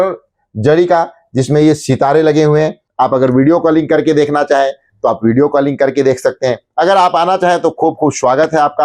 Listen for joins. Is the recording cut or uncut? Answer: cut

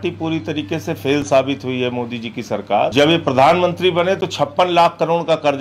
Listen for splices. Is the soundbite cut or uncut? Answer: cut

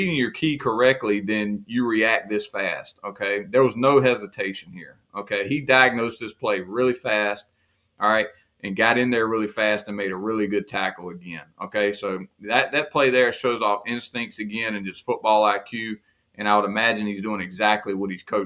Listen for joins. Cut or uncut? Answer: uncut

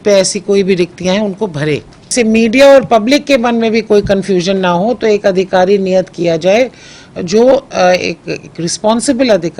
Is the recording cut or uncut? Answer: cut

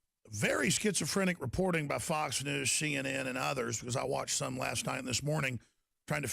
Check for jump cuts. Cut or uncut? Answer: cut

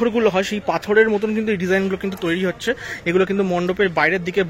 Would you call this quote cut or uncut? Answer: uncut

